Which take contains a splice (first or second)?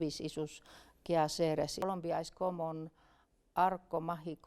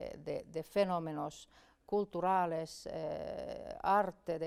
first